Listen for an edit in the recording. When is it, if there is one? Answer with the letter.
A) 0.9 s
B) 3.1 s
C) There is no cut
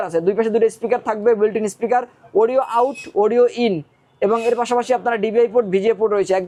C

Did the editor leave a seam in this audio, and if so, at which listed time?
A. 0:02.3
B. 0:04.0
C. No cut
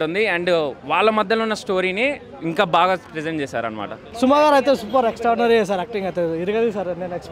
B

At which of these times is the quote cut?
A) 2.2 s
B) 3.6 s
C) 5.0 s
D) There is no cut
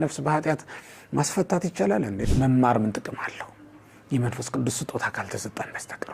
A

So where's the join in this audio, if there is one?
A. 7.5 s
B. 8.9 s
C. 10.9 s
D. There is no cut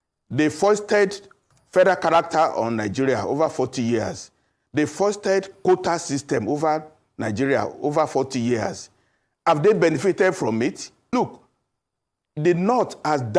C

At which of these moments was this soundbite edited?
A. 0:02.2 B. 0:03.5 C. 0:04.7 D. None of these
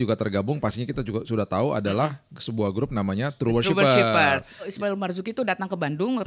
C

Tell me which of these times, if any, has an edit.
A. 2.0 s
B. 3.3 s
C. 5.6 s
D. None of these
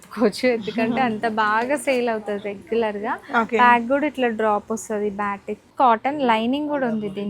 C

